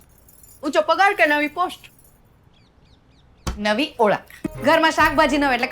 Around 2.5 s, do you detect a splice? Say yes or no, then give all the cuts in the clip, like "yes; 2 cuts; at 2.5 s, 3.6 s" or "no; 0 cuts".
no; 1 cut; at 4.4 s